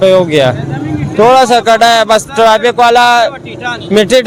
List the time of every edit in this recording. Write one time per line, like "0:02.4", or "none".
none